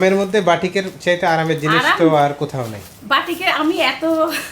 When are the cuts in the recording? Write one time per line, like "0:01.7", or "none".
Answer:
none

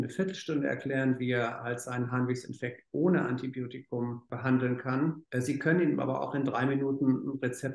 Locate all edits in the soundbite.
0:04.3
0:05.2

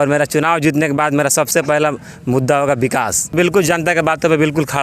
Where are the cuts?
0:03.3

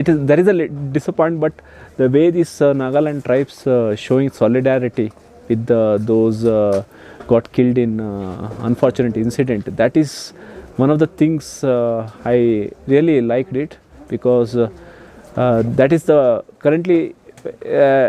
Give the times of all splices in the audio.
none

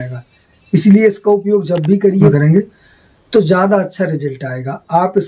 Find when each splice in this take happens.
0:02.3

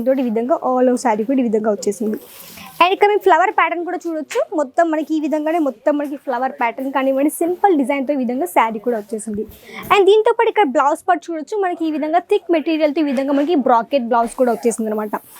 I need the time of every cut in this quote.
none

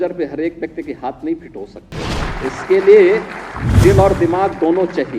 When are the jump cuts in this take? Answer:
0:02.2

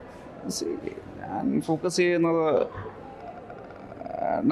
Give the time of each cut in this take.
none

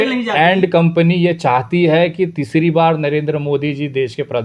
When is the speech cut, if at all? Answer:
none

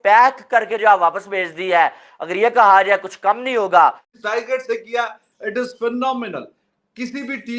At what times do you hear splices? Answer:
0:04.1

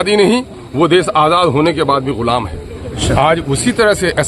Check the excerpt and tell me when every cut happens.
0:02.9

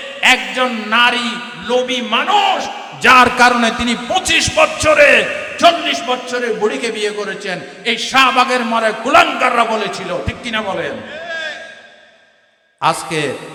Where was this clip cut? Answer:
none

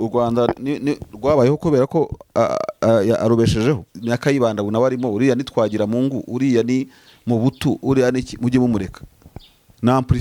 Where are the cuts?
0:03.9

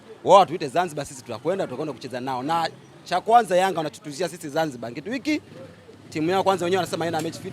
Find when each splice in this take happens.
none

